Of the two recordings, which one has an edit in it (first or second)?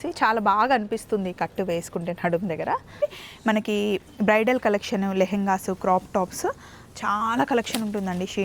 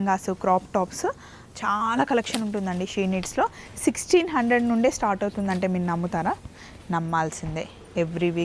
first